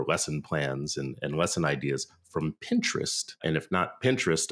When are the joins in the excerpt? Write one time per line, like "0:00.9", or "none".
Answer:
0:03.4